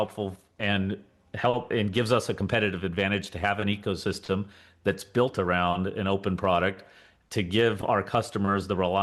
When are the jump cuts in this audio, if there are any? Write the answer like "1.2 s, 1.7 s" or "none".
none